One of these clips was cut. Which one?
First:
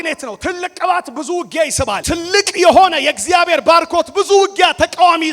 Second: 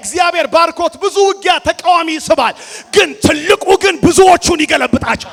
first; 1 cut; at 2.0 s

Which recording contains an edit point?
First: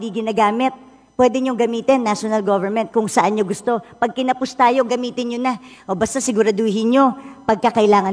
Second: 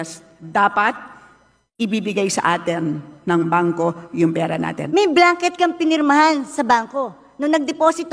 second; 1 cut; at 4.8 s

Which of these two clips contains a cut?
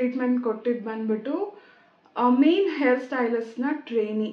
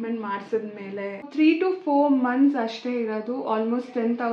second; 1 cut; at 1.3 s

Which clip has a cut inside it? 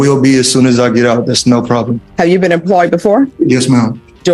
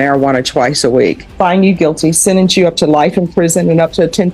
second; 1 cut; at 1.3 s

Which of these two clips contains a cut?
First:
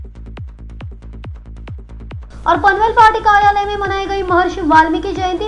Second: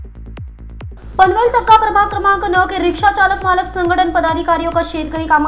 second; 1 cut; at 0.9 s

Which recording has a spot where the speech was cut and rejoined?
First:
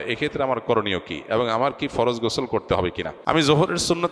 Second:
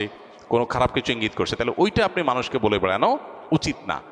first; 1 cut; at 3.1 s

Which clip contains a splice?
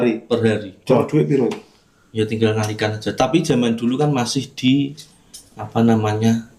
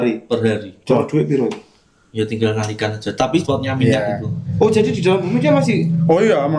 second; 1 cut; at 3.4 s

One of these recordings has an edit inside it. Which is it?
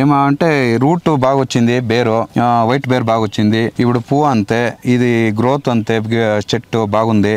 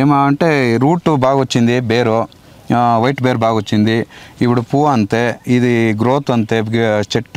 first; 2 cuts; at 2.3 s, 3.7 s

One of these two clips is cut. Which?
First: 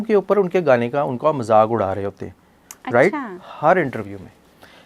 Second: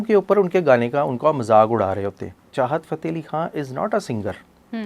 second; 1 cut; at 2.4 s

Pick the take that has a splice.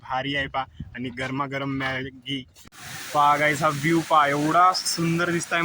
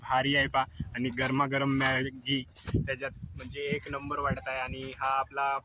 first; 1 cut; at 2.6 s

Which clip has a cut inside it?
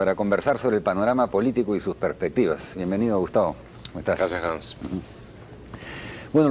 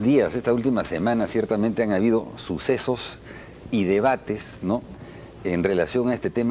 first; 1 cut; at 5.2 s

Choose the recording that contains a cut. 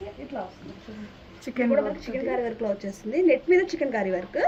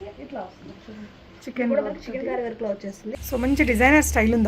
second; 1 cut; at 3.1 s

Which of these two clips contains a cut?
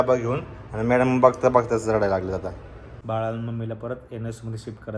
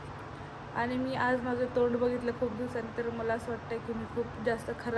first; 1 cut; at 2.9 s

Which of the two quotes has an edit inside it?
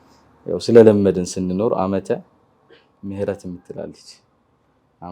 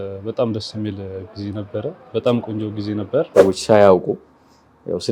second; 1 cut; at 3.3 s

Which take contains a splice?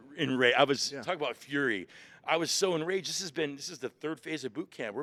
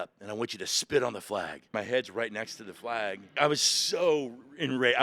second; 2 cuts; at 1.7 s, 3.3 s

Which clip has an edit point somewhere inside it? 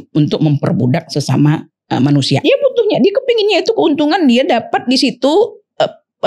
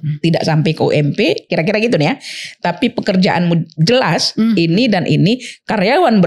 first; 1 cut; at 2.4 s

